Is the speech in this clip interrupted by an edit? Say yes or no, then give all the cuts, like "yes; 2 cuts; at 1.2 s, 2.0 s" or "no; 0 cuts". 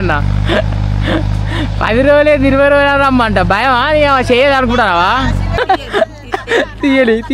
yes; 1 cut; at 5.4 s